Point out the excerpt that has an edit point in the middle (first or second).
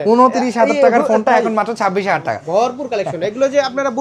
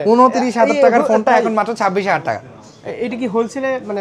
first